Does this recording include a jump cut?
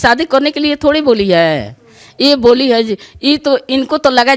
no; 0 cuts

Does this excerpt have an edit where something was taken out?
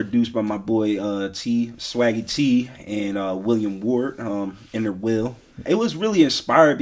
yes; 1 cut; at 5.6 s

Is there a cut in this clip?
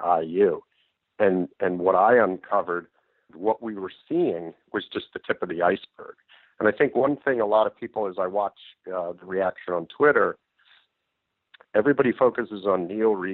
yes; 1 cut; at 3.3 s

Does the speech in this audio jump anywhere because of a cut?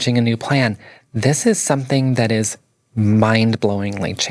no; 0 cuts

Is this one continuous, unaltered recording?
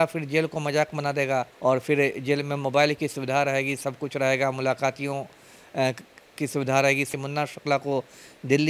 no; 2 cuts; at 1.5 s, 7.1 s

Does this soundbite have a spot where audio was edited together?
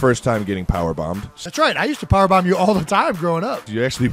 yes; 1 cut; at 1.3 s

